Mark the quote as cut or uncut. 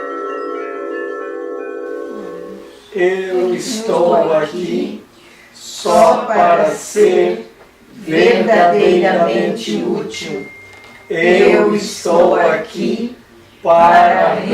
cut